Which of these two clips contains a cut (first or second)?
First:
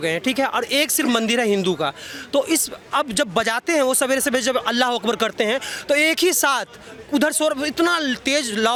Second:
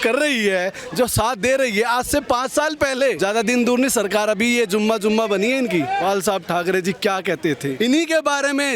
second